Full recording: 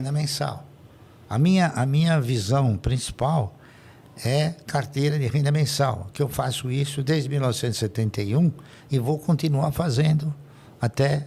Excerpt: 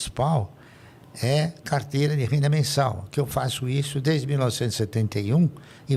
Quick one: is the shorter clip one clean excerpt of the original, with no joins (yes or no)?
yes